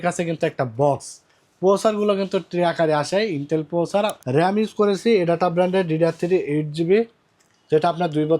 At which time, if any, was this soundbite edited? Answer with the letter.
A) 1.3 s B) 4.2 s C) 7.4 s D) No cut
B